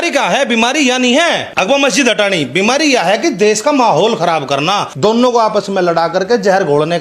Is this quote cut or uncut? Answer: cut